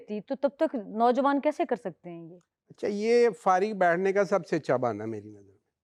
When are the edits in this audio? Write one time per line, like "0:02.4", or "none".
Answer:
none